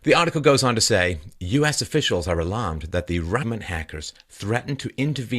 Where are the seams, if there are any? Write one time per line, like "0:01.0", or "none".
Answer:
none